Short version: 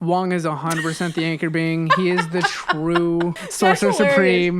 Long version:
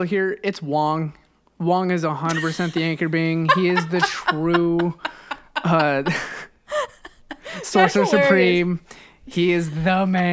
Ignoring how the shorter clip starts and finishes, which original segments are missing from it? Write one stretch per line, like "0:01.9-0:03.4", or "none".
0:05.0-0:07.6